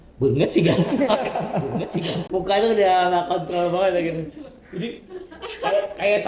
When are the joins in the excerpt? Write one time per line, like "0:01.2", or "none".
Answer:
none